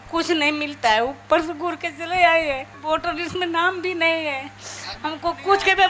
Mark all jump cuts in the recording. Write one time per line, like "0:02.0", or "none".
0:02.8